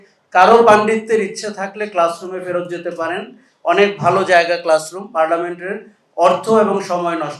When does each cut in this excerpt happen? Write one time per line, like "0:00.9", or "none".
none